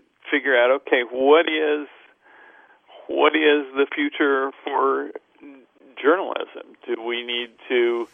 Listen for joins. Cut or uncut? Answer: uncut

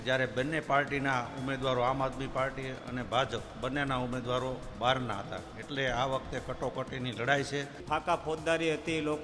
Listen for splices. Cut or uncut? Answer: cut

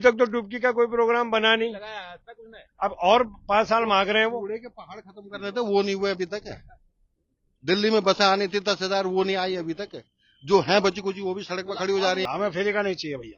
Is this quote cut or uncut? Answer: cut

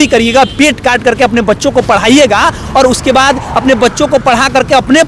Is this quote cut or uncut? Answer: uncut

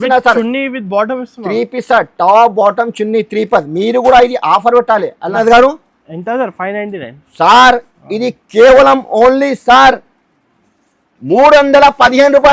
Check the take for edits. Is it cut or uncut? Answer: cut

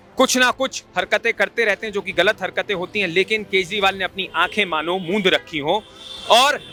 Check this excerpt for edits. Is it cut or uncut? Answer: uncut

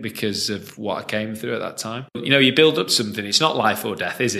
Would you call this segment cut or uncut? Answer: cut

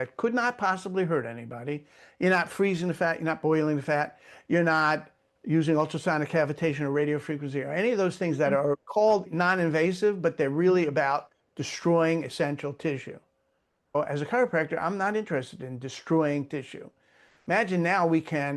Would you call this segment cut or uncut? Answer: cut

